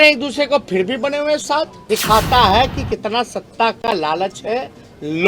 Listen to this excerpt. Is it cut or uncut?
cut